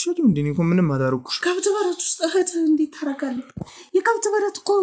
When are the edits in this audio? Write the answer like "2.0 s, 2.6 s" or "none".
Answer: none